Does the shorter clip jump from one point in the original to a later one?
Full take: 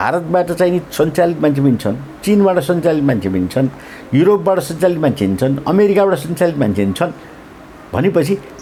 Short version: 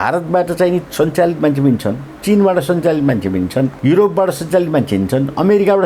yes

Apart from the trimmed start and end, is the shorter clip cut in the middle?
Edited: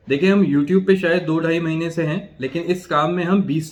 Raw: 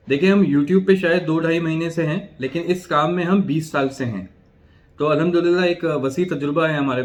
no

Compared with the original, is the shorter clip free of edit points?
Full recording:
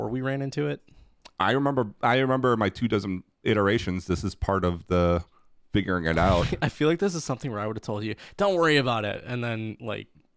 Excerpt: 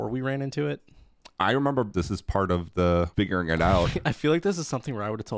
no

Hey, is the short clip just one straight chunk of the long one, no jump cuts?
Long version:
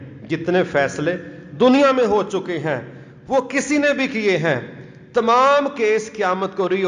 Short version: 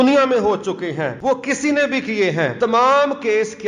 no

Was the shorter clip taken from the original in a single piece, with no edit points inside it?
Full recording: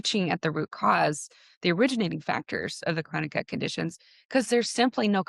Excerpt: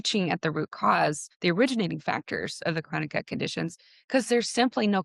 no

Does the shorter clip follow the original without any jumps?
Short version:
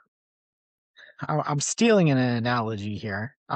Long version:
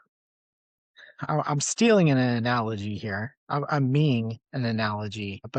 yes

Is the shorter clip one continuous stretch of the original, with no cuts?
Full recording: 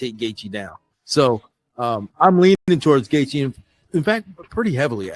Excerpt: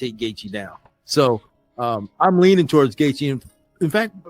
no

